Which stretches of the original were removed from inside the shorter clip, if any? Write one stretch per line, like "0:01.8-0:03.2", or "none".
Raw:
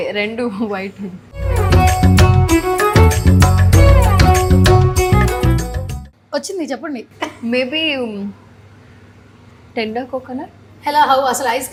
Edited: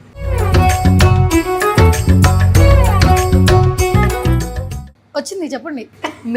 none